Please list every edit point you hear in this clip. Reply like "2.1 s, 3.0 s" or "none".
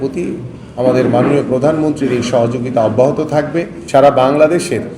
3.8 s